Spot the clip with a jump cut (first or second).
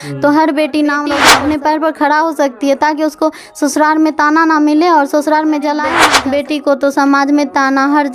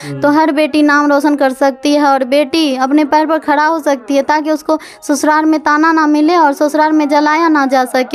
first